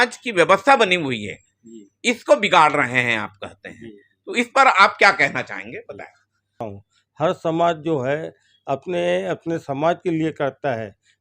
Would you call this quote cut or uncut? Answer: cut